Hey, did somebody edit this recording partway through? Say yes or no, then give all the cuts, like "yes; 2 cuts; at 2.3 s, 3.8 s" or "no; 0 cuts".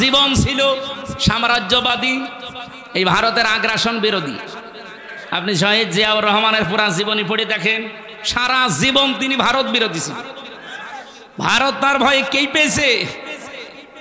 no; 0 cuts